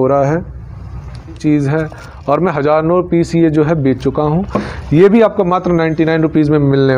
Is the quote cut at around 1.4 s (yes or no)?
yes